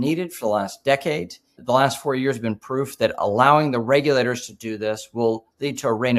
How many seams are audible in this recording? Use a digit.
1